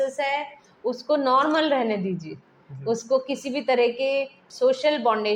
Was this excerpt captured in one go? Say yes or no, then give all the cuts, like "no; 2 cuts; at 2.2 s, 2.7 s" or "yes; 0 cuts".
no; 1 cut; at 4.4 s